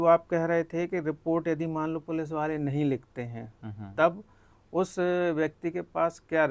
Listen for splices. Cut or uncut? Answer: uncut